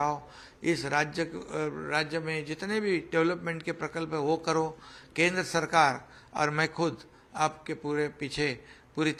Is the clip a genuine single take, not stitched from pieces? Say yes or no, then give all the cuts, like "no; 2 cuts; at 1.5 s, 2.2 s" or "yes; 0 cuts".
yes; 0 cuts